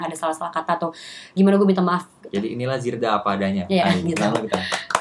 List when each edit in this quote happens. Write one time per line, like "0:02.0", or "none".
none